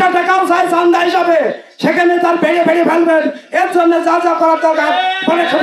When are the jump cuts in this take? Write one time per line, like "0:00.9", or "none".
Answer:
none